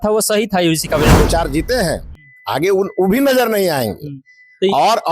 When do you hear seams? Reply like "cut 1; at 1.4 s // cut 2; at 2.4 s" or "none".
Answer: cut 1; at 1.1 s